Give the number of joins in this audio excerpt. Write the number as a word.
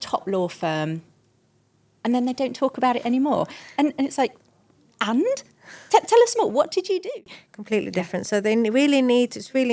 one